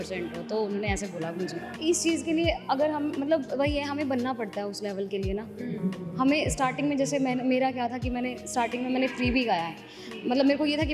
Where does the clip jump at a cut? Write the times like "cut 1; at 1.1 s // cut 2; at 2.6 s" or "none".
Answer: cut 1; at 1.7 s